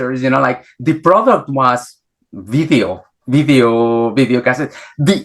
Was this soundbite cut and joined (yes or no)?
no